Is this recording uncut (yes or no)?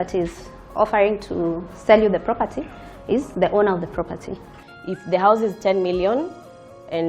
no